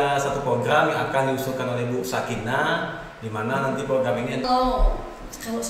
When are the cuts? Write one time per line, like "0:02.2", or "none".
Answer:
0:04.4